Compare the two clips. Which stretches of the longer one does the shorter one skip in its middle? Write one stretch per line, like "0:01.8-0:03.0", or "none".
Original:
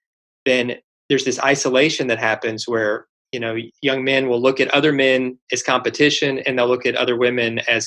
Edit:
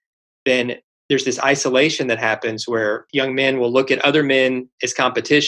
0:03.0-0:03.7